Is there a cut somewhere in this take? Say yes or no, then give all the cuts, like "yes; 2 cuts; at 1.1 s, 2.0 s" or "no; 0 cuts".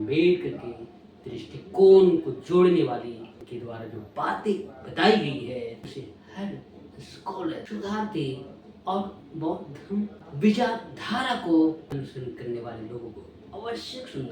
yes; 4 cuts; at 3.5 s, 5.9 s, 7.6 s, 11.9 s